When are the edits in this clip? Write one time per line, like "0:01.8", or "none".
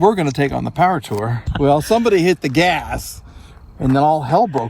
0:01.4